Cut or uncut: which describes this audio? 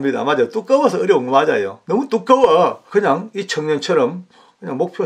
cut